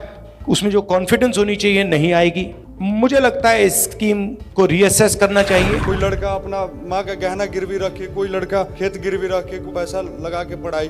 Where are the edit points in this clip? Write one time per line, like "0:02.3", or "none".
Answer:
0:05.9
0:08.7
0:09.7

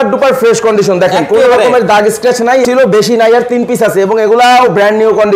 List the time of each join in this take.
0:02.6

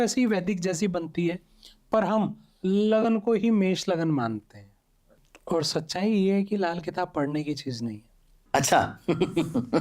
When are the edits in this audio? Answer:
0:05.3

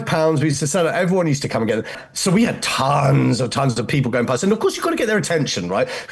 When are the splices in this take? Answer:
0:02.1

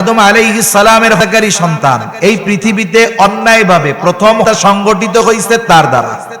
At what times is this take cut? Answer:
0:01.2
0:04.4

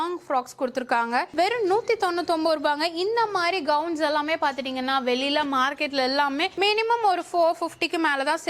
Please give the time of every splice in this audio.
0:01.3

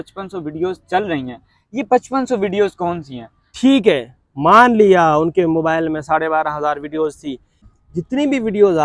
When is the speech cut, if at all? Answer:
0:03.5
0:07.6

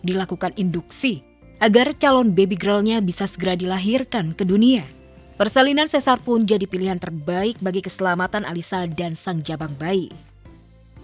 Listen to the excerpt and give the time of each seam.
0:10.1

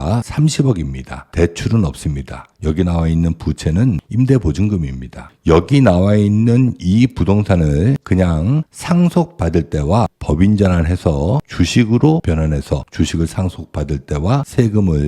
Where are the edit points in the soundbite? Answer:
0:05.4

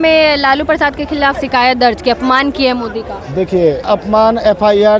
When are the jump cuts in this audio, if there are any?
0:01.4
0:03.9

